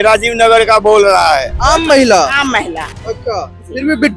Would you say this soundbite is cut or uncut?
cut